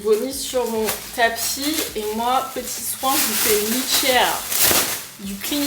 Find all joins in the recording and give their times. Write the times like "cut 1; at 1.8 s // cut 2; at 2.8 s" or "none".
none

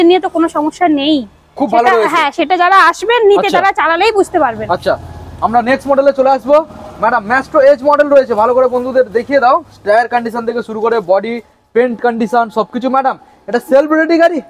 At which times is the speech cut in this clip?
none

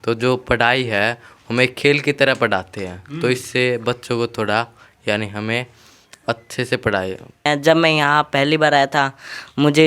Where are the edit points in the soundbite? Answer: cut 1; at 7.5 s

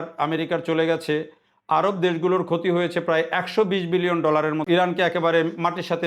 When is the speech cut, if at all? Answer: cut 1; at 4.6 s

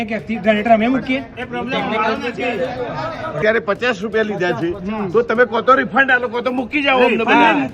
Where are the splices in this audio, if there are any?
cut 1; at 3.4 s

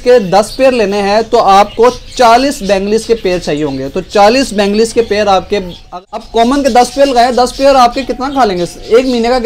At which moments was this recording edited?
cut 1; at 5.8 s

